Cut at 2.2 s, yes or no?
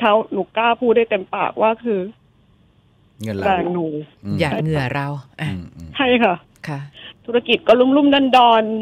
no